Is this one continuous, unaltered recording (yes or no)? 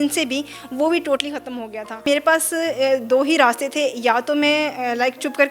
no